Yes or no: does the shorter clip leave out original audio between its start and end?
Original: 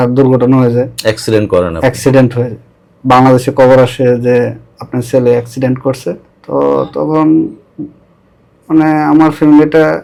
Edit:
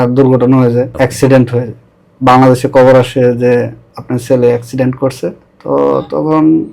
yes